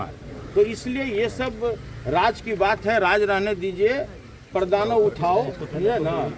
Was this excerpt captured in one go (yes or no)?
yes